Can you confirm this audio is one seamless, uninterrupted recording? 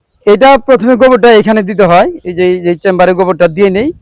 yes; 0 cuts

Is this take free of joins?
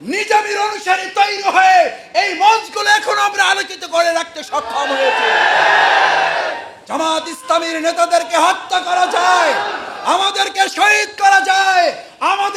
yes; 0 cuts

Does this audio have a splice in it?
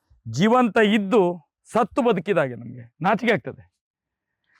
no; 0 cuts

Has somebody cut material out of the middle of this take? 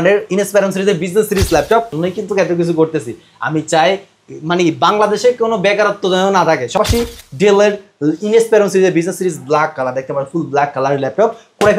yes; 2 cuts; at 1.9 s, 6.8 s

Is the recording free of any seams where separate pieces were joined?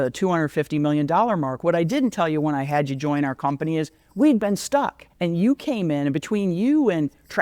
no; 1 cut; at 5.0 s

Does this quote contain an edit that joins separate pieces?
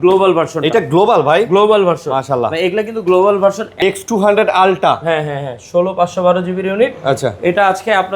yes; 1 cut; at 3.8 s

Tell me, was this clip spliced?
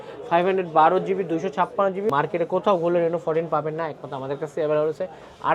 yes; 1 cut; at 2.1 s

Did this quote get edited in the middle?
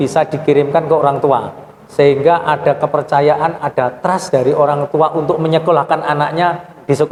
no; 0 cuts

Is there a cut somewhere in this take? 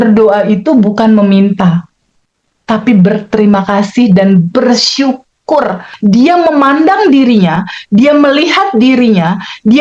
yes; 1 cut; at 5.9 s

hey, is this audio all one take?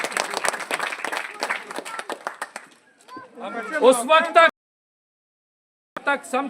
no; 1 cut; at 3.4 s

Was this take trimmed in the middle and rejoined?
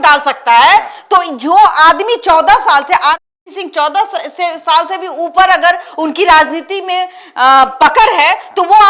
no; 0 cuts

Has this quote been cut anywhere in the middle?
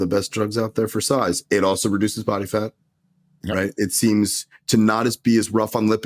no; 0 cuts

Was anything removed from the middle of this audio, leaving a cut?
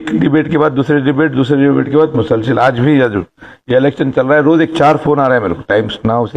no; 0 cuts

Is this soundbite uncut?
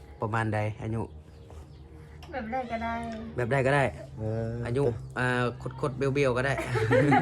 yes; 0 cuts

